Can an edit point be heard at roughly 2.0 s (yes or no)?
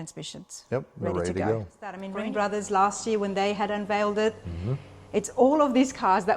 yes